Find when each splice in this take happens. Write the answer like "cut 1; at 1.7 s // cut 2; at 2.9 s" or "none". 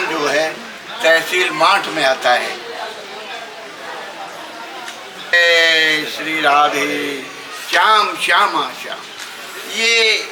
cut 1; at 5.3 s